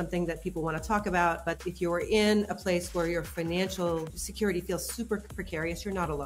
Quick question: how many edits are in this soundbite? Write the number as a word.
one